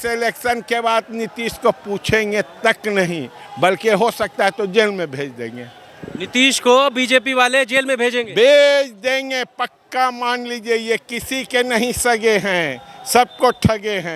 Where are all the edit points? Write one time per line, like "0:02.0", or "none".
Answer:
none

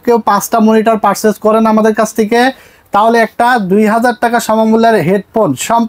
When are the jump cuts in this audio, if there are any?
none

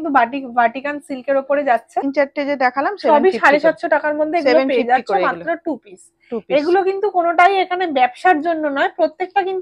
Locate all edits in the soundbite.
0:02.1

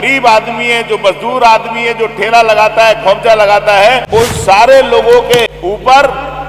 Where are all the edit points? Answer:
0:04.0
0:05.5

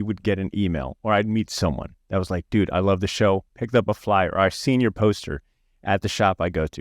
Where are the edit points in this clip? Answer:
none

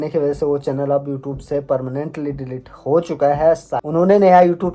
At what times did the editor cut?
0:03.8

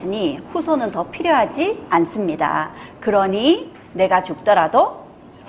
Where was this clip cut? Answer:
none

